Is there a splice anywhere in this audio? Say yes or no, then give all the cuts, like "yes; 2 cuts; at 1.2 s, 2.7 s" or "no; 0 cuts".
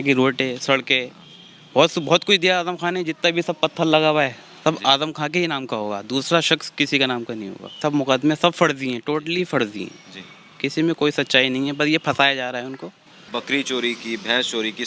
yes; 2 cuts; at 7.8 s, 13.2 s